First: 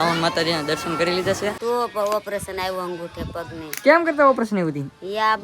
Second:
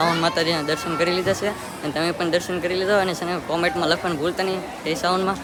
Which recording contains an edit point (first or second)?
first